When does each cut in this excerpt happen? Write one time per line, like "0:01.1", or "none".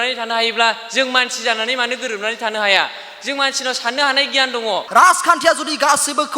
0:04.8